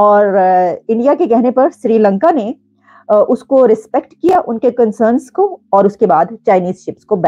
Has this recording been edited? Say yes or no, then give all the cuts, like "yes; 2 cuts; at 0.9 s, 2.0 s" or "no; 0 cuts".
no; 0 cuts